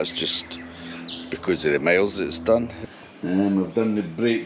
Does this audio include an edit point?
yes; 1 cut; at 2.7 s

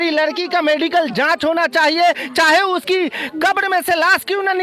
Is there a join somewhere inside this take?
no; 0 cuts

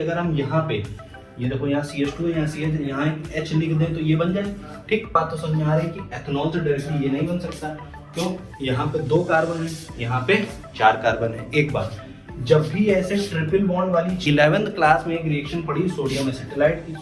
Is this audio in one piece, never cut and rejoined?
no; 2 cuts; at 5.2 s, 14.2 s

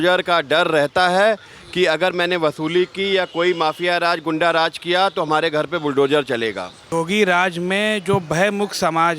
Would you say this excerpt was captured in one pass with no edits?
no; 1 cut; at 6.8 s

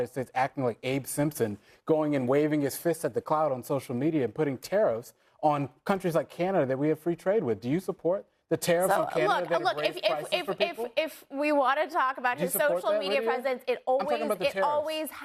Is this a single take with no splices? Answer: yes; 0 cuts

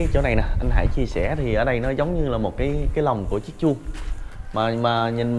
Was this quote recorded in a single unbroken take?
yes; 0 cuts

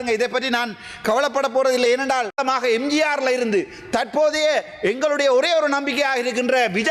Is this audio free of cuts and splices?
no; 1 cut; at 2.3 s

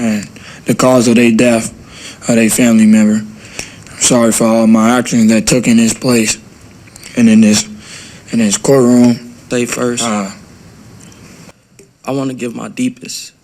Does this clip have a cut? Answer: yes; 1 cut; at 11.5 s

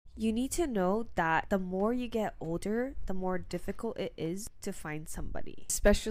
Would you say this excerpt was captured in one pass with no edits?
yes; 0 cuts

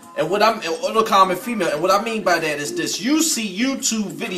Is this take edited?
yes; 1 cut; at 2.4 s

